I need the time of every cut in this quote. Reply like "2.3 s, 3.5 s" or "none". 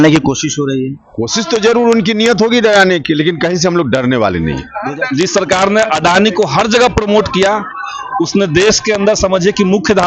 4.8 s